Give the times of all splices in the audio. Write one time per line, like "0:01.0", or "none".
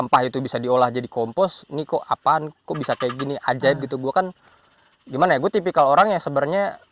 none

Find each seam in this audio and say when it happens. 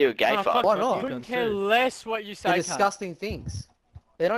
none

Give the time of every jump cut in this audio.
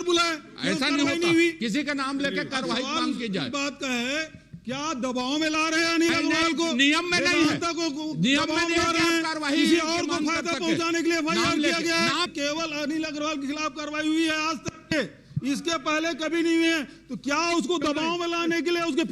0:12.3

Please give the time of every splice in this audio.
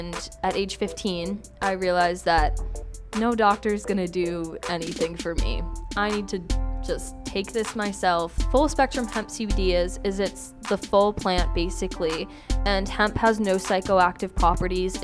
0:08.4

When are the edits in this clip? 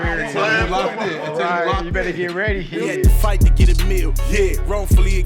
0:03.0

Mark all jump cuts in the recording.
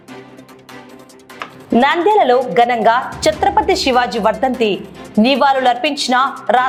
none

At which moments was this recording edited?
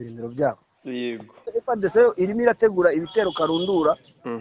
0:01.3

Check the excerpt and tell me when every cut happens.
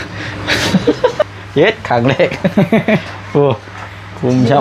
0:01.4

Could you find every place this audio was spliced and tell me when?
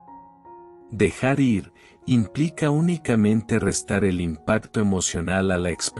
0:00.9

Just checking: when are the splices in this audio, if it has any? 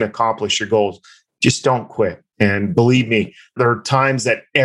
0:02.2

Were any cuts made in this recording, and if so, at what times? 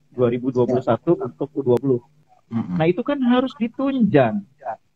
0:01.8

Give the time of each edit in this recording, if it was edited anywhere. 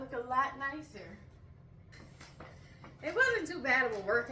0:01.9

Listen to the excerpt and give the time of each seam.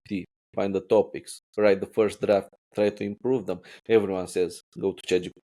none

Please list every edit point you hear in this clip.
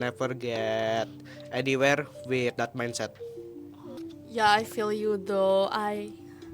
0:04.0

